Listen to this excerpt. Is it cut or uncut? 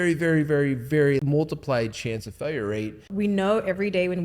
cut